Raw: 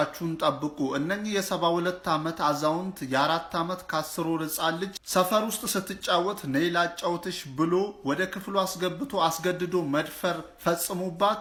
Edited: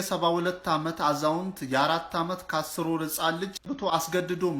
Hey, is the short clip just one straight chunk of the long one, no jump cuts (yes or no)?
no